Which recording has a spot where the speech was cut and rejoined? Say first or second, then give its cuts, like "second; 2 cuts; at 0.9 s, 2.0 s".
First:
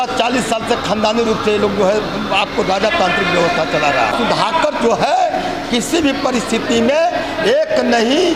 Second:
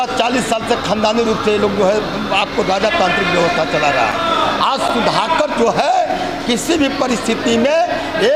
first; 1 cut; at 4.1 s